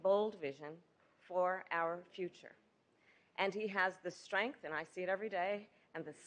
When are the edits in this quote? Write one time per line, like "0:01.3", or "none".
0:05.0